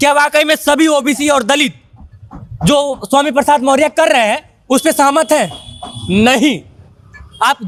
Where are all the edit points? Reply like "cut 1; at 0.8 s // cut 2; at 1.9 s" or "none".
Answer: none